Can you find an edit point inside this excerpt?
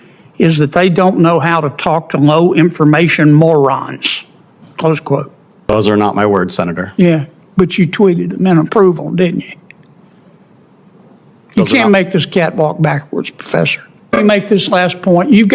yes; 2 cuts; at 5.7 s, 14.1 s

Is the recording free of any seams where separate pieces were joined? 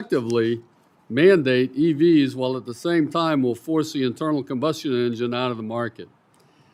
yes; 0 cuts

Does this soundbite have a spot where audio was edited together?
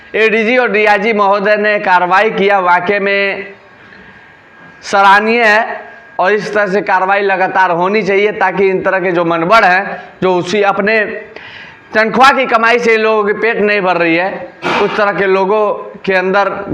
no; 0 cuts

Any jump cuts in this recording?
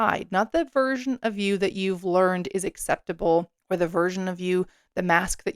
yes; 1 cut; at 3.6 s

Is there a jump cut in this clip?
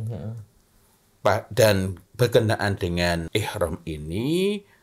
yes; 1 cut; at 3.2 s

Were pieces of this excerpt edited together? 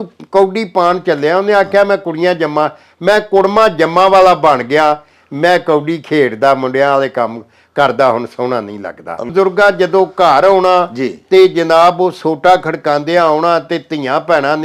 yes; 1 cut; at 9.2 s

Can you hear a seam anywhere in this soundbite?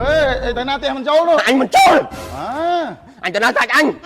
no; 0 cuts

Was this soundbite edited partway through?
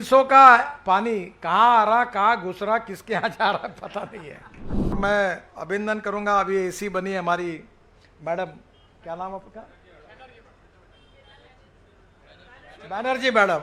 yes; 1 cut; at 5.0 s

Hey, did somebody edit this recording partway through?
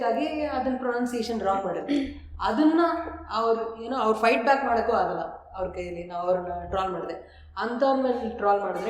no; 0 cuts

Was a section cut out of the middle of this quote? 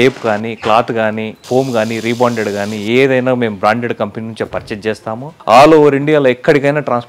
yes; 1 cut; at 5.3 s

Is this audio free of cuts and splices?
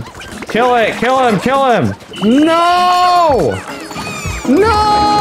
no; 1 cut; at 2.1 s

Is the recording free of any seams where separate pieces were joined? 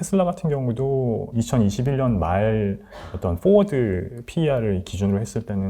no; 1 cut; at 1.3 s

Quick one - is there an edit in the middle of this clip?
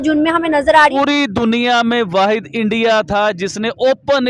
yes; 1 cut; at 0.9 s

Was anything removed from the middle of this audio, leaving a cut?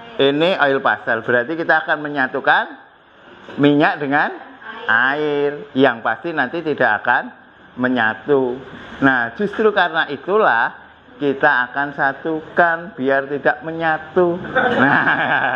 no; 0 cuts

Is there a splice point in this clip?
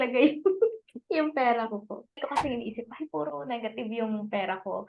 yes; 1 cut; at 2.2 s

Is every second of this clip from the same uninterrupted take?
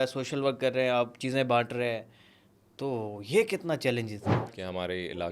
no; 1 cut; at 4.4 s

